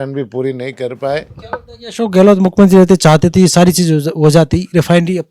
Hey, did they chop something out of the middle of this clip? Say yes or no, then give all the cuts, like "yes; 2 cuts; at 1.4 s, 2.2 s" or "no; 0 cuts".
yes; 1 cut; at 1.4 s